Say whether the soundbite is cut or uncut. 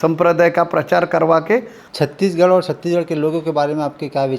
cut